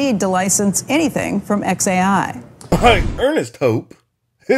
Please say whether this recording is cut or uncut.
uncut